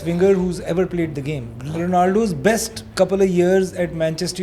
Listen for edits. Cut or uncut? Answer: cut